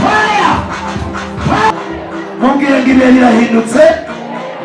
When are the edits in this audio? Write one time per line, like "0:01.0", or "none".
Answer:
0:01.7